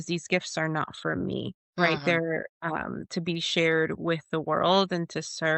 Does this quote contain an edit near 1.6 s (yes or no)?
yes